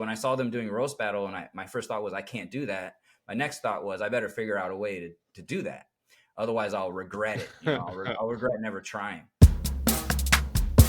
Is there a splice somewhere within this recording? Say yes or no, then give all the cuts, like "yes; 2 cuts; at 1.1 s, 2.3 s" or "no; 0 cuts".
yes; 1 cut; at 9.3 s